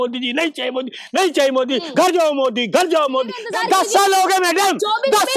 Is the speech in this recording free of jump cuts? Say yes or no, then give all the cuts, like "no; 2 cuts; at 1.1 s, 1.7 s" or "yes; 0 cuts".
no; 1 cut; at 3.4 s